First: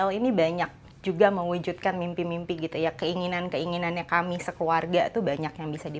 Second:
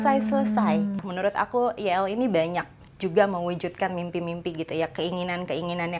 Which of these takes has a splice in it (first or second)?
second